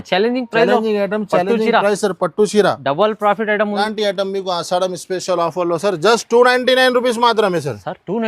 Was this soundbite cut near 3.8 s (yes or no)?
yes